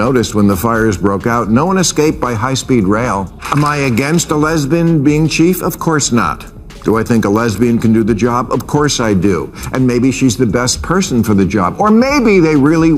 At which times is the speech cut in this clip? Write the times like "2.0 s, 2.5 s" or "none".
3.4 s

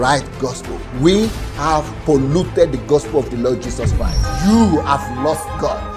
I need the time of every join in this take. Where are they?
4.3 s

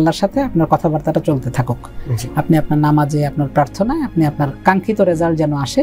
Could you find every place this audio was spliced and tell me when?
none

